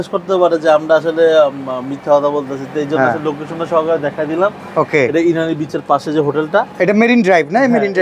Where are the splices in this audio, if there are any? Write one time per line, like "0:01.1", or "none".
none